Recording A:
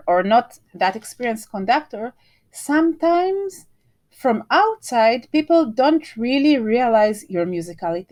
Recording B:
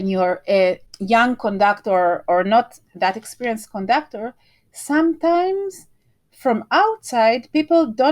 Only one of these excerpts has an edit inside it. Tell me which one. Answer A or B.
B